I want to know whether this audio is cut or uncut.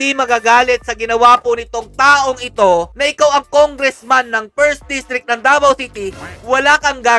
uncut